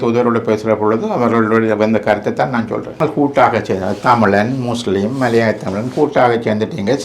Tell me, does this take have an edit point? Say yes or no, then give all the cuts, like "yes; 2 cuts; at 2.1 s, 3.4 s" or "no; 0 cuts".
yes; 1 cut; at 3.0 s